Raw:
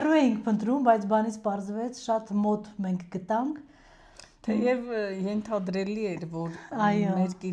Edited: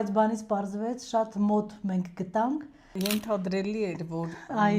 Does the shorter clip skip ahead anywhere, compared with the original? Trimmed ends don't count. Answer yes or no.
yes